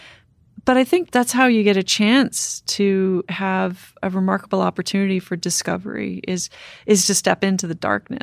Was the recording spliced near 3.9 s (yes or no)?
yes